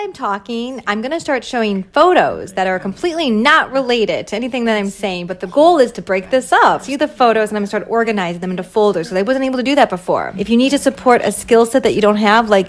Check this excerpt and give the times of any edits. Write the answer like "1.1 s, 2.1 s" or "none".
6.9 s, 10.3 s